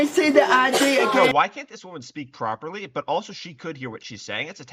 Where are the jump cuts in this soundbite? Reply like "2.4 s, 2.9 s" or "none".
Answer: 1.1 s